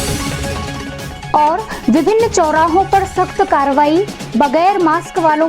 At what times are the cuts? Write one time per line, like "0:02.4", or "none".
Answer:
0:01.2